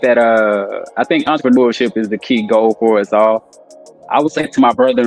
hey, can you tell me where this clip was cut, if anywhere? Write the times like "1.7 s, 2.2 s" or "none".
none